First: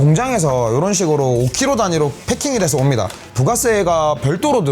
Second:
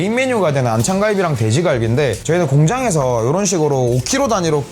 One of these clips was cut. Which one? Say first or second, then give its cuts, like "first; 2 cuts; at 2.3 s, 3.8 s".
first; 1 cut; at 3.3 s